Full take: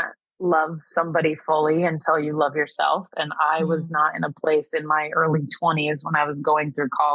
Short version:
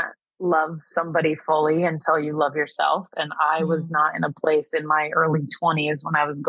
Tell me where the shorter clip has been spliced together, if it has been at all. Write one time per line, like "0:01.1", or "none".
none